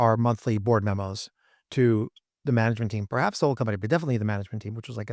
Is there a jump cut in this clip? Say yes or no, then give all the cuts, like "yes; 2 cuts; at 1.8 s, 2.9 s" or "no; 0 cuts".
no; 0 cuts